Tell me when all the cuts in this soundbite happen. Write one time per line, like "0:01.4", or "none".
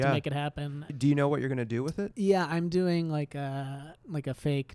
0:00.9